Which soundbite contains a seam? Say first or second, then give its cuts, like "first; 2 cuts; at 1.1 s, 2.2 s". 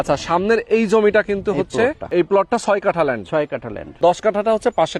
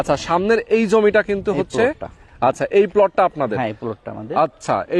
first; 2 cuts; at 2.1 s, 4.0 s